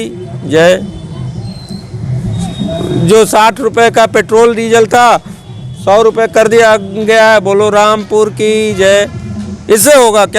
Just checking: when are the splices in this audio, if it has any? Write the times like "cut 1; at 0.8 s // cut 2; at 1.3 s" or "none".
none